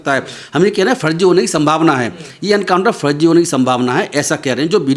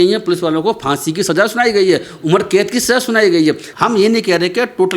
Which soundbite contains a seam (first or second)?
second